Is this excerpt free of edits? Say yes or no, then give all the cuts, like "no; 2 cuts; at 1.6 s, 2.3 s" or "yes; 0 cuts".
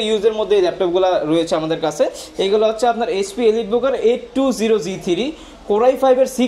yes; 0 cuts